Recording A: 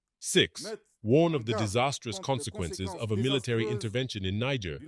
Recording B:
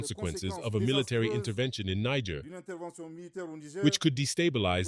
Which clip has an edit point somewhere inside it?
B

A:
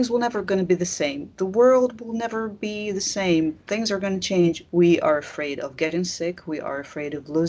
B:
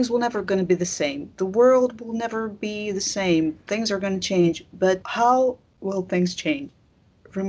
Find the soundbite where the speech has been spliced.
A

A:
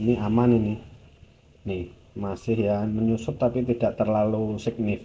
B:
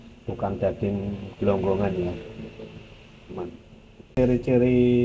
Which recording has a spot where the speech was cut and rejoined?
B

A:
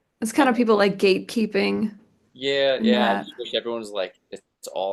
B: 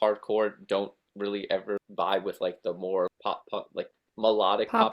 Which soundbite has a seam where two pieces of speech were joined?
B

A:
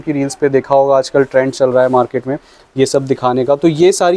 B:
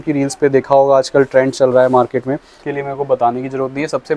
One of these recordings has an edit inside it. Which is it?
B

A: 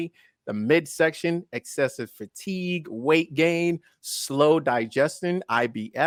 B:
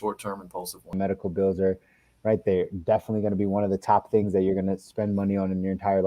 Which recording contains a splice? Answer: B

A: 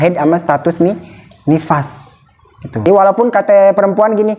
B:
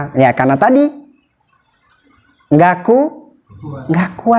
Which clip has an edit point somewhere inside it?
A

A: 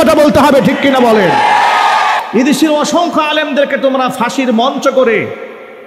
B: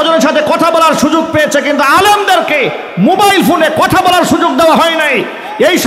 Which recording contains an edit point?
A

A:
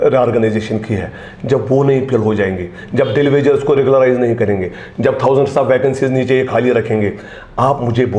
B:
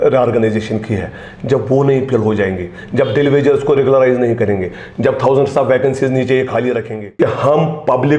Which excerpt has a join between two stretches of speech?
B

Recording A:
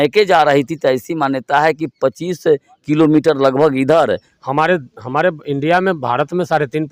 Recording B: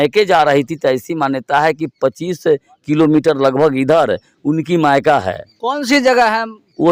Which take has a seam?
A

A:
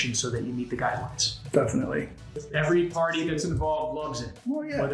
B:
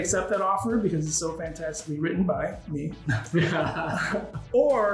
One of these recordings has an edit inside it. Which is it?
A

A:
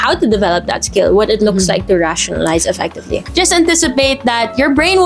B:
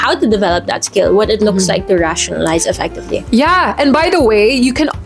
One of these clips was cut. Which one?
A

